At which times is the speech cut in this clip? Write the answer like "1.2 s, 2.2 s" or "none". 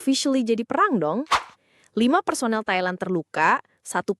1.4 s

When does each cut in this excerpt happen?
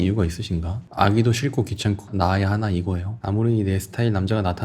3.1 s

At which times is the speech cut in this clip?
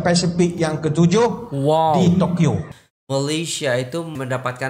2.7 s

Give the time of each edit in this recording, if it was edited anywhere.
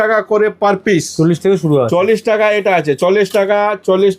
none

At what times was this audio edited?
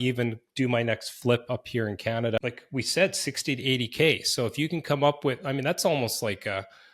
2.4 s

